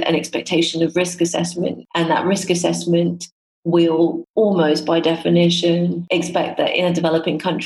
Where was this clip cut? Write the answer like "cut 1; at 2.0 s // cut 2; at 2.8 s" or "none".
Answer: cut 1; at 1.8 s // cut 2; at 4.2 s // cut 3; at 6.0 s